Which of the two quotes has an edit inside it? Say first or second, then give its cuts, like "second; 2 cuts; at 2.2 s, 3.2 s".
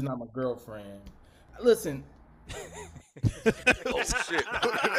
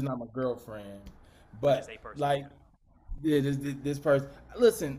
first; 1 cut; at 1.4 s